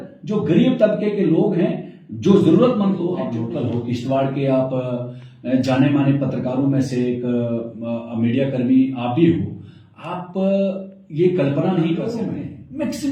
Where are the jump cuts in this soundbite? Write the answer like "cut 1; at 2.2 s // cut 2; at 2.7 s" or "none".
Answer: cut 1; at 3.2 s // cut 2; at 12.2 s